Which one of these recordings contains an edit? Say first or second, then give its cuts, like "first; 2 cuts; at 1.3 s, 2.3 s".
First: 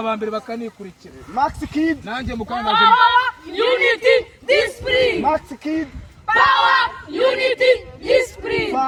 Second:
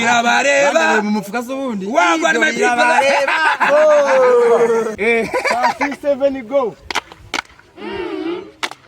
second; 1 cut; at 4.9 s